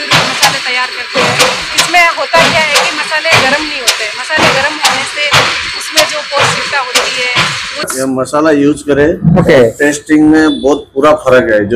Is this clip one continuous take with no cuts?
no; 1 cut; at 7.9 s

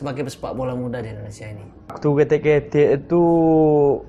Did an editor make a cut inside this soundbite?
yes; 1 cut; at 2.0 s

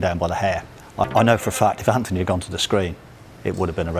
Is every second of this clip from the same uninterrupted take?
no; 1 cut; at 1.0 s

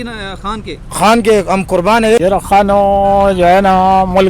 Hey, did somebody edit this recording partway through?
yes; 1 cut; at 2.2 s

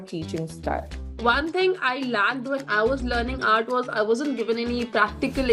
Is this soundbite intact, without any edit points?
no; 1 cut; at 1.1 s

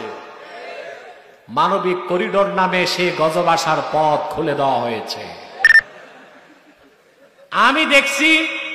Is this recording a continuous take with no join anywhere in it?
no; 1 cut; at 5.6 s

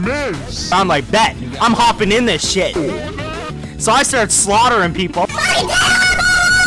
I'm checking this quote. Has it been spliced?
no; 0 cuts

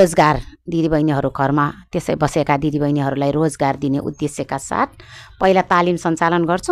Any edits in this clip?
no; 0 cuts

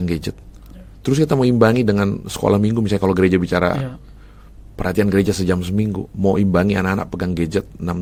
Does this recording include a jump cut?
no; 0 cuts

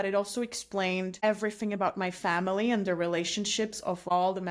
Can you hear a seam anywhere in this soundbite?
no; 0 cuts

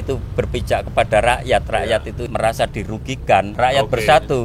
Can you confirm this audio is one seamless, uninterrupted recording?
no; 2 cuts; at 2.2 s, 3.5 s

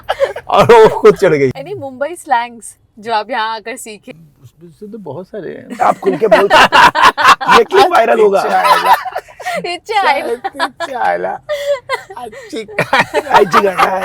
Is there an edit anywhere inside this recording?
yes; 2 cuts; at 1.6 s, 4.0 s

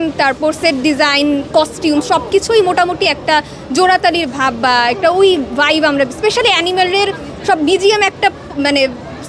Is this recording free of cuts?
yes; 0 cuts

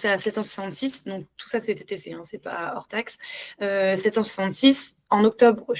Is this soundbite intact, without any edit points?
yes; 0 cuts

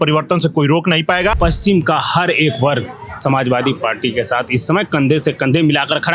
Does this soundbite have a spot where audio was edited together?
yes; 1 cut; at 1.3 s

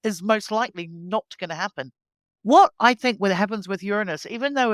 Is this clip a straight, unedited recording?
yes; 0 cuts

